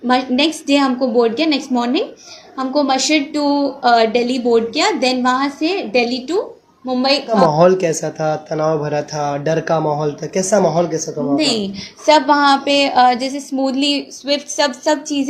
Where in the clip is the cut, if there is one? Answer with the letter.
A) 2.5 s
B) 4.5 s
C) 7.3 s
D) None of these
C